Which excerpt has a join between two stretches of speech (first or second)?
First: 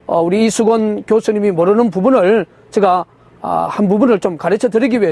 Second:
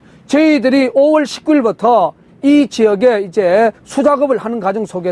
second